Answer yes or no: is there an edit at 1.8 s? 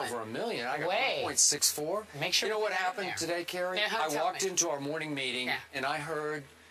yes